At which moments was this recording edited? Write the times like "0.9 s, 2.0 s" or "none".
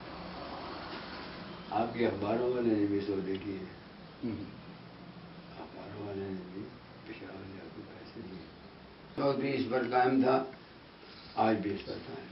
9.1 s